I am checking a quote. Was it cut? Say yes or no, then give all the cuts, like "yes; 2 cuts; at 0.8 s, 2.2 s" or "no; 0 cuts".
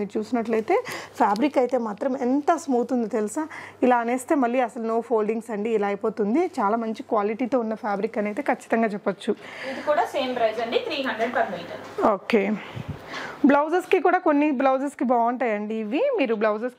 no; 0 cuts